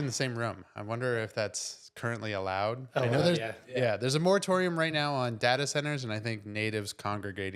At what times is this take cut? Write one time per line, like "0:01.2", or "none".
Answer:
none